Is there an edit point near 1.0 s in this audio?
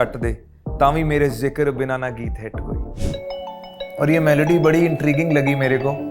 no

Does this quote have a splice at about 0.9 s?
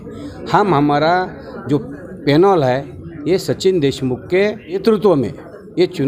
no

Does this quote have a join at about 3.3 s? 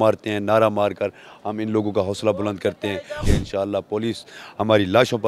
yes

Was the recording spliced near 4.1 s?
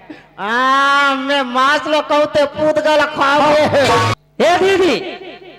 yes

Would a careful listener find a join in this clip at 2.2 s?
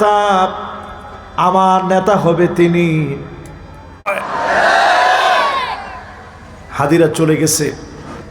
no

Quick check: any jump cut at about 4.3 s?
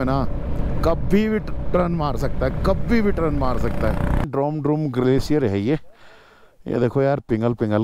yes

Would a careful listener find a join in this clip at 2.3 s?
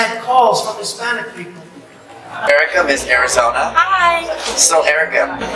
yes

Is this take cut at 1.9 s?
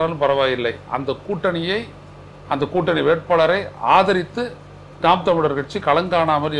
no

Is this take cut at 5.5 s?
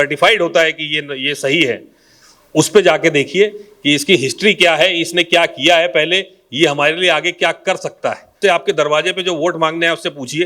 no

